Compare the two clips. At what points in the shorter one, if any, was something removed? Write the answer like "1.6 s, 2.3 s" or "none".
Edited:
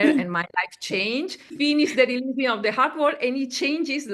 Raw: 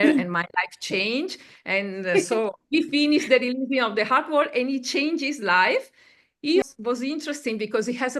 1.5 s

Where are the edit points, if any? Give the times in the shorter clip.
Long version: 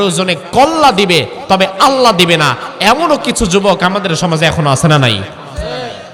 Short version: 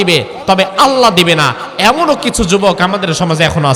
none

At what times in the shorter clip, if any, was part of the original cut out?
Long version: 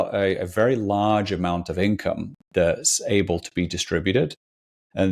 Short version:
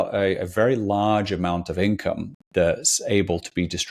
none

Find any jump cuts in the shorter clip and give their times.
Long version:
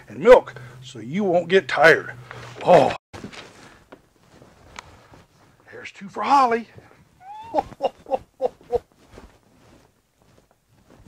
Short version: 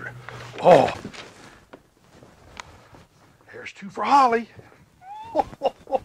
1.0 s

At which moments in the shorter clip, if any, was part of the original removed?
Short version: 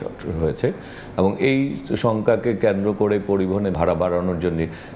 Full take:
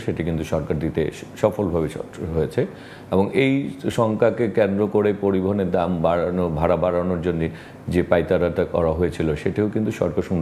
3.7 s

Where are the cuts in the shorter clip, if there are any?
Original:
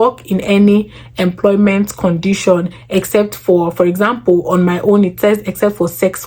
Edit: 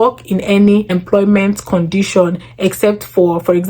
0.9 s

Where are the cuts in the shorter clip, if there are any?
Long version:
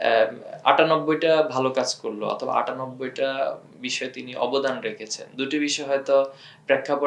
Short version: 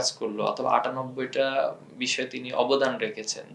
none

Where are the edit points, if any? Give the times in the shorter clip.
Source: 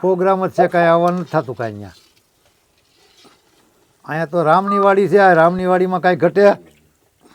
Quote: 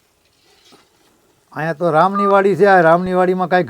none

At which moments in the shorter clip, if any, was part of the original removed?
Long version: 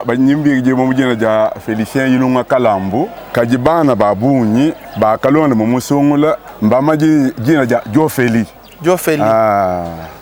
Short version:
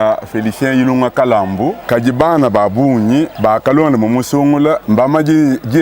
1.8 s, 3.3 s, 4.8 s

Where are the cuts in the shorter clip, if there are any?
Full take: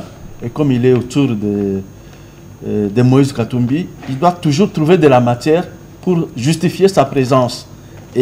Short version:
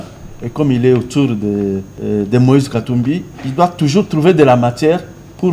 1.9 s

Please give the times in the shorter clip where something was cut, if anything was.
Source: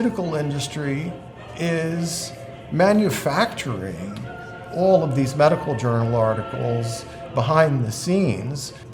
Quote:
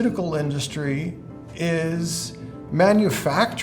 none

